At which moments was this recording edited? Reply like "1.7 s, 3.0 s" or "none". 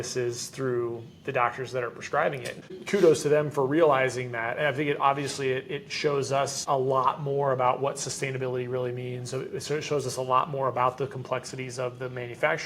2.7 s, 6.6 s